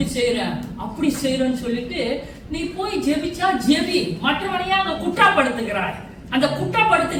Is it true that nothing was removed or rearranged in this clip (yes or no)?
yes